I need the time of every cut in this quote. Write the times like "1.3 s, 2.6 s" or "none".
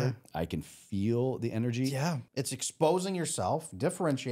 2.2 s